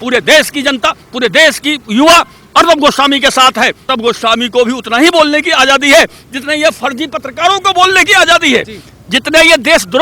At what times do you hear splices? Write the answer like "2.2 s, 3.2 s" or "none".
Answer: 3.9 s